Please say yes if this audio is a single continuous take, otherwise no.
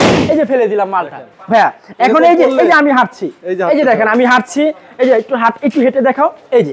yes